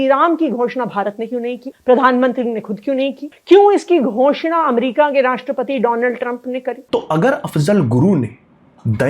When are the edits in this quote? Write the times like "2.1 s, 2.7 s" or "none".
1.7 s, 3.3 s

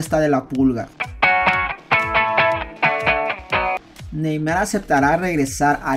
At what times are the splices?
1.0 s, 3.8 s

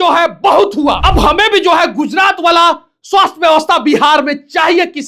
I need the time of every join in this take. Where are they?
1.0 s

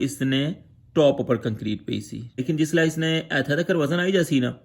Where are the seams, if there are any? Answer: 2.4 s

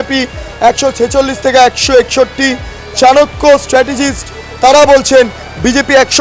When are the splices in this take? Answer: none

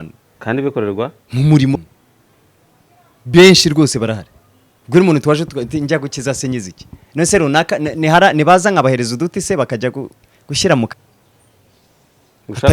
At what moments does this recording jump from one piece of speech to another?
1.8 s, 10.9 s

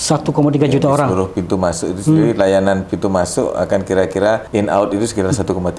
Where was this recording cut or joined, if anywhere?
4.4 s

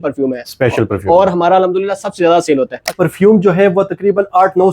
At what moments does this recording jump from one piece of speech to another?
2.9 s

